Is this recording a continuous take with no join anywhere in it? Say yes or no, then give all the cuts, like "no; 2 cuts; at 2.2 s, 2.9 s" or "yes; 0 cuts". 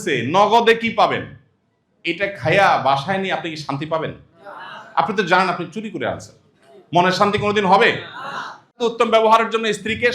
no; 1 cut; at 8.8 s